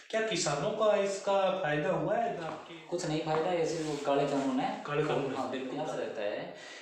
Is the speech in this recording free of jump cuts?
no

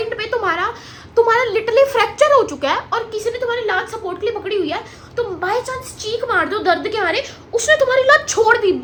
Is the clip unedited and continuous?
yes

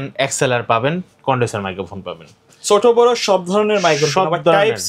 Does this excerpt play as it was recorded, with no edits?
yes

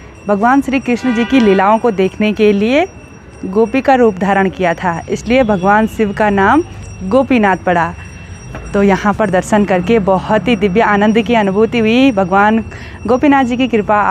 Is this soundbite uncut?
yes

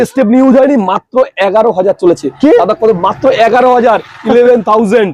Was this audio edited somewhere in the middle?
no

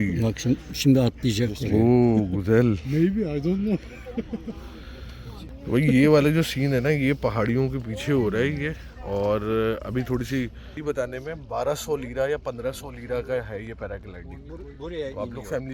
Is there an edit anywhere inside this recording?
no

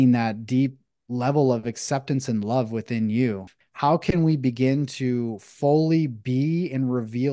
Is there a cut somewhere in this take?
yes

